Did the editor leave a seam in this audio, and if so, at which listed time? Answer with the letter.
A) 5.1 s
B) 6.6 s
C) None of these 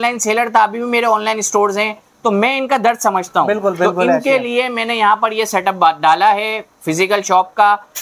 C